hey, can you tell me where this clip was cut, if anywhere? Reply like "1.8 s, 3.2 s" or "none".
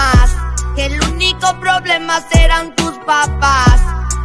none